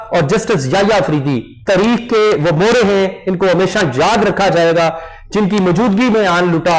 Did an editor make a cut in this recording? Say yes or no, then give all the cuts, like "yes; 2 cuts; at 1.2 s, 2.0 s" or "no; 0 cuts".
no; 0 cuts